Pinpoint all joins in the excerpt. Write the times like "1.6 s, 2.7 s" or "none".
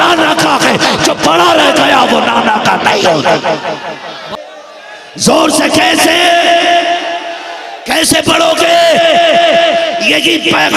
4.2 s